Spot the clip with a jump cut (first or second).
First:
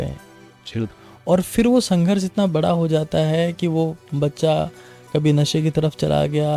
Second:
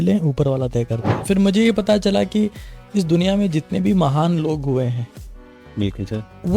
second